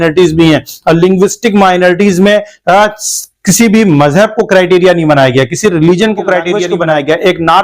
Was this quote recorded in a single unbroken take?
no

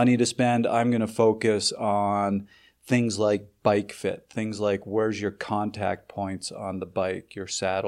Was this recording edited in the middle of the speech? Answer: no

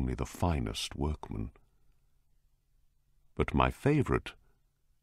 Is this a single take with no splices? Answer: no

